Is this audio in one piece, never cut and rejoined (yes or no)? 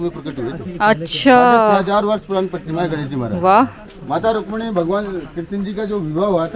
yes